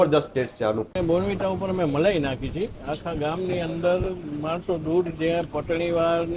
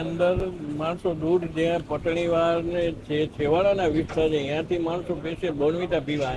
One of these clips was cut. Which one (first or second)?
first